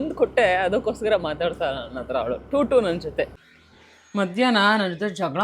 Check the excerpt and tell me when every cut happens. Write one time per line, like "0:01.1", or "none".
0:03.3